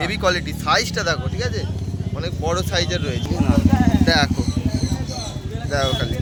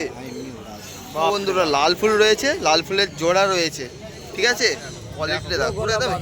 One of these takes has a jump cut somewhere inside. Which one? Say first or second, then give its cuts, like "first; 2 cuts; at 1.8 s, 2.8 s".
second; 2 cuts; at 1.3 s, 5.1 s